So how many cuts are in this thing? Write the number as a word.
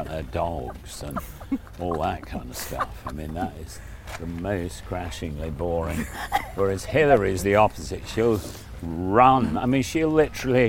zero